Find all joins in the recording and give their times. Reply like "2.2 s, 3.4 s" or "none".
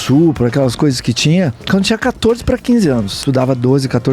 1.6 s, 3.1 s